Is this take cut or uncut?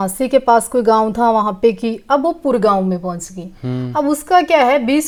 uncut